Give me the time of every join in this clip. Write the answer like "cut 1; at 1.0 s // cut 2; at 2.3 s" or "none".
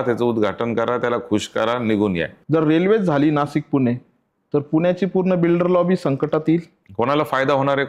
cut 1; at 2.3 s // cut 2; at 6.8 s